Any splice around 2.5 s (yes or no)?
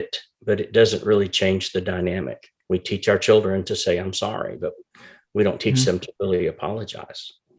yes